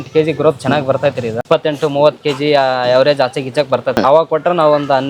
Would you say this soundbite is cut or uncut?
cut